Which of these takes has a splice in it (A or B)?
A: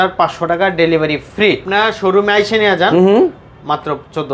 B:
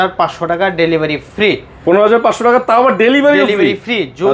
A